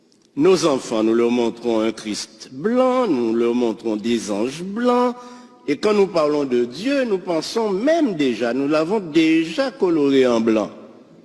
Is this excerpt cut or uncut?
uncut